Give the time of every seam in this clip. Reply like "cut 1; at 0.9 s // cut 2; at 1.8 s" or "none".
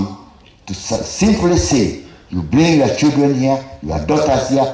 cut 1; at 1.3 s